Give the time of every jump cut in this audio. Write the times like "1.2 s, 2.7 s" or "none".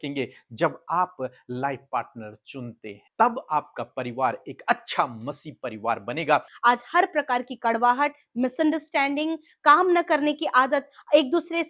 3.0 s, 6.5 s